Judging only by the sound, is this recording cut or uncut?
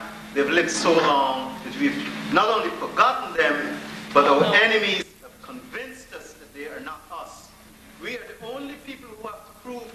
cut